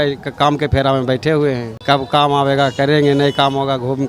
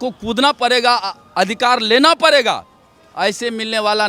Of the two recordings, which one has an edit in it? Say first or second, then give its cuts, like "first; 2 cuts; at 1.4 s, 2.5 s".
first; 1 cut; at 1.7 s